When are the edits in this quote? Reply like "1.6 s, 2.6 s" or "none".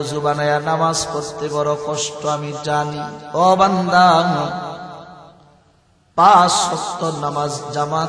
3.2 s